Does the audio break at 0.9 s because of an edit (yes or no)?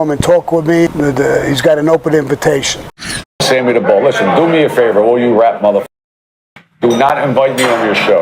yes